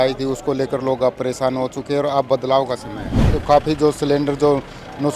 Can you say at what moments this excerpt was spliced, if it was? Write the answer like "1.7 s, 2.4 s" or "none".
3.2 s